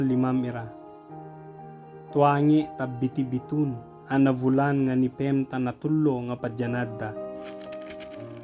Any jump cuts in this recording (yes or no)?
yes